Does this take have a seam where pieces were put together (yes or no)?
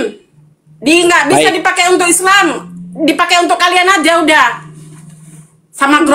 no